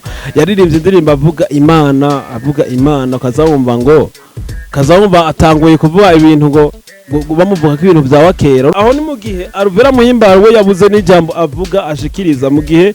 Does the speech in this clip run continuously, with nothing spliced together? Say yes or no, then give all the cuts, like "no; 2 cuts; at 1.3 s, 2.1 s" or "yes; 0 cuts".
no; 1 cut; at 8.7 s